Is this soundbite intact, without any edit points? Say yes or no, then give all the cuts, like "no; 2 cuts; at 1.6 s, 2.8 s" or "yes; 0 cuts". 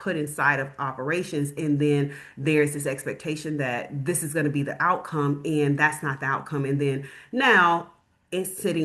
yes; 0 cuts